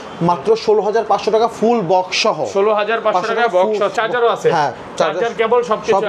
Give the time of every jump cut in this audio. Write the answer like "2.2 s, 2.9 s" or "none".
none